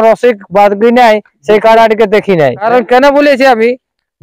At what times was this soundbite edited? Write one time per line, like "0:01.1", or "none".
0:02.6

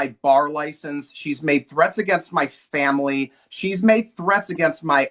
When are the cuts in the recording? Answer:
none

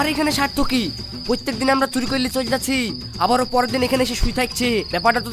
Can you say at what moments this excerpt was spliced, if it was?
none

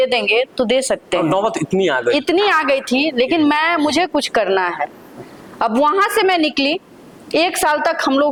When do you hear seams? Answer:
none

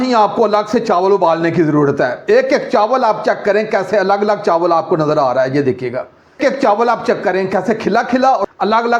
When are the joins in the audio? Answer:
none

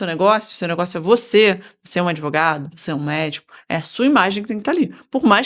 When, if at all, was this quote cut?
none

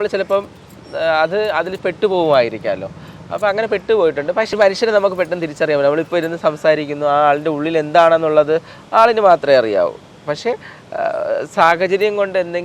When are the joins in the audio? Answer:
0:04.5

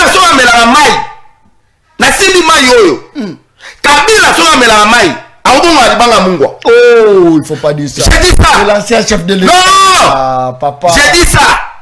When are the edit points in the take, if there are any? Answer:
none

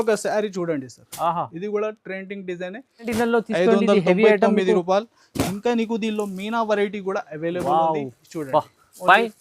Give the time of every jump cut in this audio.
0:03.1

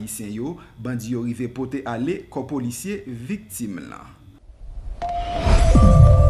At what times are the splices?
0:04.2

